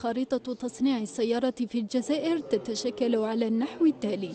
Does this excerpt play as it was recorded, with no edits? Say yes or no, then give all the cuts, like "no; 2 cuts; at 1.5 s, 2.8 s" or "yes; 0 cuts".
no; 1 cut; at 1.7 s